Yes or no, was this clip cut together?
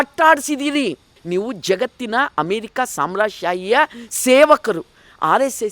yes